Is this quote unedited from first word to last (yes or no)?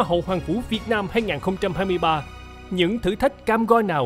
no